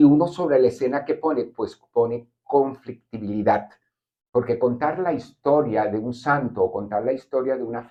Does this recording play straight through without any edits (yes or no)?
yes